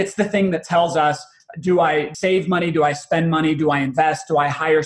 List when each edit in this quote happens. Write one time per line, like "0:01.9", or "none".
0:02.1